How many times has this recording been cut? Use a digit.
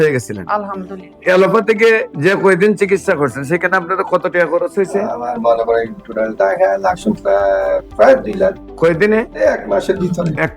1